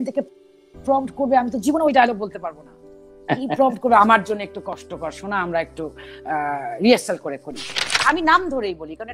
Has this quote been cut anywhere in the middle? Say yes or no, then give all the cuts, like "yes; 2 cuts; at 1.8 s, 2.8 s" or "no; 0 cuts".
yes; 1 cut; at 8.0 s